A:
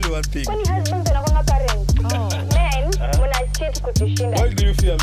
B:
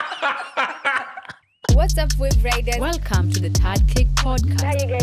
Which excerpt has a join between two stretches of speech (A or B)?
B